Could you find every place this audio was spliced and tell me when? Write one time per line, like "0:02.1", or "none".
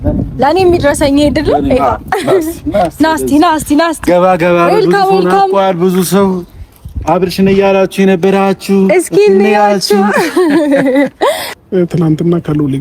0:11.5